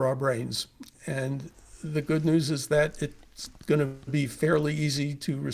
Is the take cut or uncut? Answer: uncut